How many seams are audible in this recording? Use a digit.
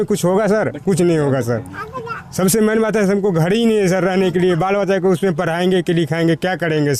0